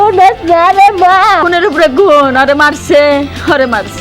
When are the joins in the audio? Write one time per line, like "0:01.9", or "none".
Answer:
0:01.5